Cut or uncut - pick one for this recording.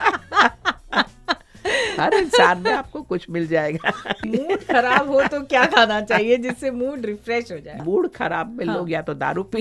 cut